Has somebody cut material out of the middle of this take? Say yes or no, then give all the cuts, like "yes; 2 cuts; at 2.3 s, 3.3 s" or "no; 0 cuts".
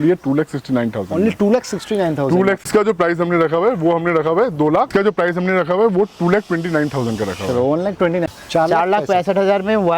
yes; 3 cuts; at 2.6 s, 4.9 s, 8.2 s